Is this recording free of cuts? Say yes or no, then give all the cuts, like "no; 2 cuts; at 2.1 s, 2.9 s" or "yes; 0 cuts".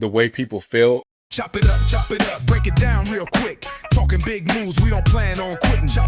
no; 1 cut; at 1.1 s